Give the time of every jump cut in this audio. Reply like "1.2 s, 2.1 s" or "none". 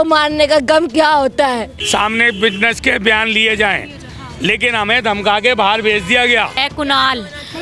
1.7 s, 6.6 s